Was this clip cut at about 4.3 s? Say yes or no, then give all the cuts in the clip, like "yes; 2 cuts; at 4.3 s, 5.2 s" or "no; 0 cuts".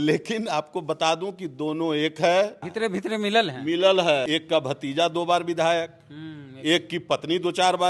yes; 2 cuts; at 2.6 s, 4.3 s